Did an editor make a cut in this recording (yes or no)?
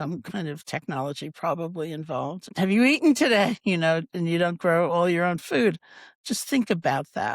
yes